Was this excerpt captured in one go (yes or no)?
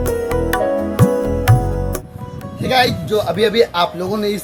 yes